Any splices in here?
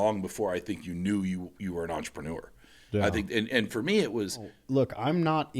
yes; 1 cut; at 4.6 s

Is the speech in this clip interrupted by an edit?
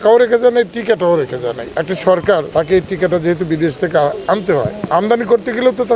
yes; 3 cuts; at 1.6 s, 2.5 s, 4.8 s

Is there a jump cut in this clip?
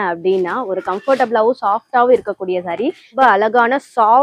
yes; 1 cut; at 3.1 s

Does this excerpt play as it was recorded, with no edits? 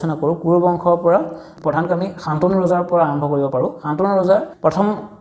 yes; 0 cuts

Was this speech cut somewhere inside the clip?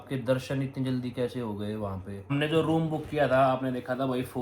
yes; 1 cut; at 2.3 s

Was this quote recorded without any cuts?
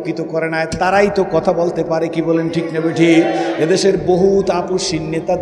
yes; 0 cuts

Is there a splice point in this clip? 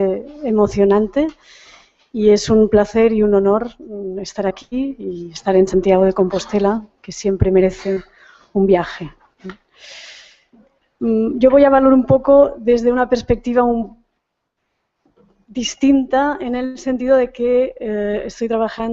yes; 1 cut; at 16.2 s

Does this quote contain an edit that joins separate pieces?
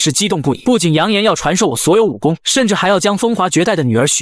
yes; 1 cut; at 2.4 s

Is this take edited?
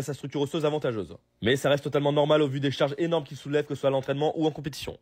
no; 0 cuts

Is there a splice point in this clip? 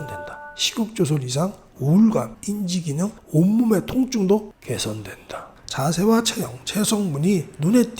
yes; 1 cut; at 5.5 s

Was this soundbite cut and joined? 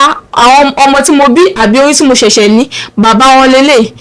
no; 0 cuts

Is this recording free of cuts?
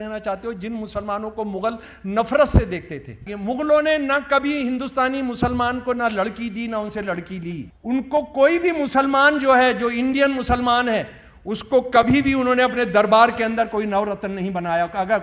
no; 2 cuts; at 3.3 s, 7.7 s

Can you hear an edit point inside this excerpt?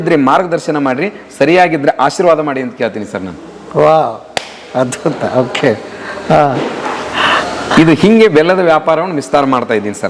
no; 0 cuts

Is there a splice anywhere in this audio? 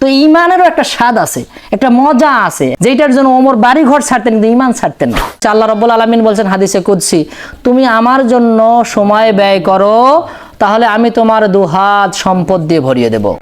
yes; 2 cuts; at 2.7 s, 5.4 s

